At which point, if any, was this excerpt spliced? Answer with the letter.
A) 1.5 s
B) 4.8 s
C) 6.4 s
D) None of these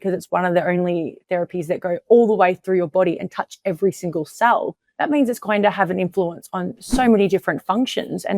B